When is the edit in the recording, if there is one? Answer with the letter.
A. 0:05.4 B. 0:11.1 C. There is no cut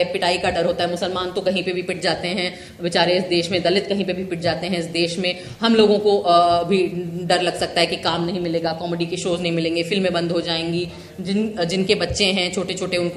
C